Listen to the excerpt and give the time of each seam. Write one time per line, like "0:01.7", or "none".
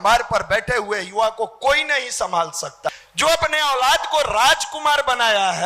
0:02.9